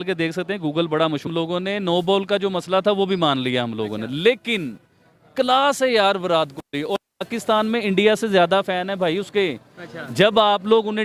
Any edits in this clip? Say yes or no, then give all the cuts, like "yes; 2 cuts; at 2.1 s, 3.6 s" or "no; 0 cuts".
yes; 1 cut; at 1.3 s